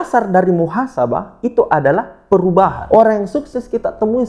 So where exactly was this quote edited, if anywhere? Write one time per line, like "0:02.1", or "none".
0:02.8